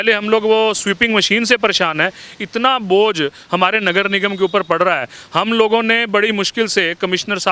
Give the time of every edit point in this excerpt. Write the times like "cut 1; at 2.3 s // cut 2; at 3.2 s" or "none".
none